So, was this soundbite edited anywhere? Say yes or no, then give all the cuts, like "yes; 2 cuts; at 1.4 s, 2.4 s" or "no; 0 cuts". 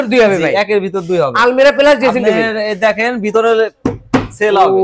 no; 0 cuts